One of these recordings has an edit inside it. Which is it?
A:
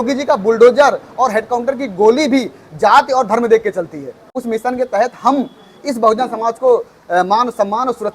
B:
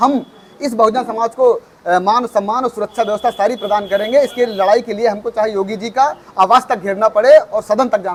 A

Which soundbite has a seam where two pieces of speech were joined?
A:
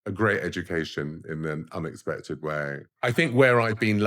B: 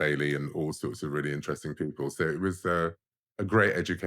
A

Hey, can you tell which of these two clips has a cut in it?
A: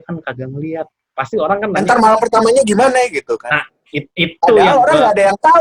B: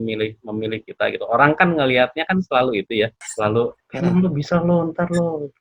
B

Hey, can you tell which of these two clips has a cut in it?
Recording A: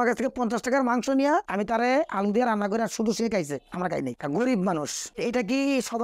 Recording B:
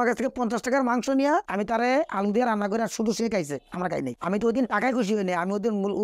B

